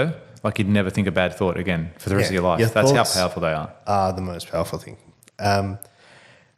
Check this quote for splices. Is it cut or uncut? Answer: uncut